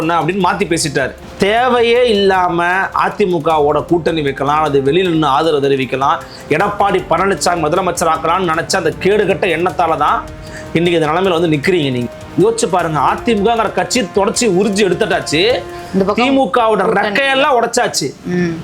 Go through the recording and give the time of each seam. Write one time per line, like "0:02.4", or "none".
0:01.2
0:12.1